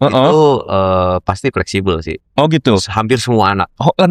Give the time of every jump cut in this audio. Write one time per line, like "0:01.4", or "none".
none

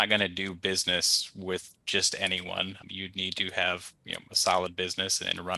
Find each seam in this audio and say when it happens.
none

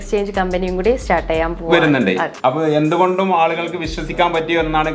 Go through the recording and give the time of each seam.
0:02.3

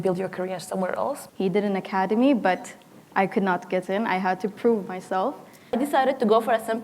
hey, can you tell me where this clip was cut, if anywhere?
0:01.2
0:05.7

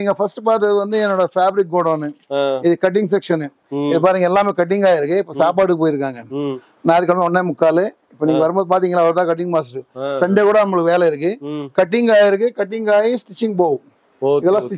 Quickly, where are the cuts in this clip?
none

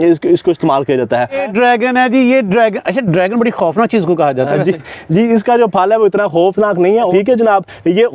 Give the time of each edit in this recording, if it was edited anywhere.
0:01.4
0:07.1

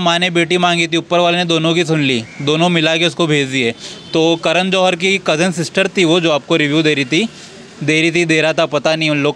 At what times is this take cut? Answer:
none

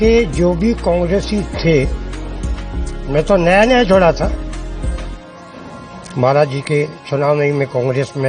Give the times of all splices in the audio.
none

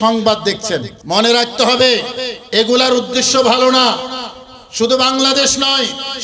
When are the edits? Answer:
0:00.9

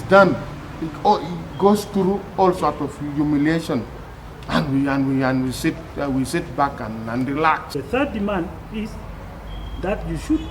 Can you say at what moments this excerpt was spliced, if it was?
0:07.7

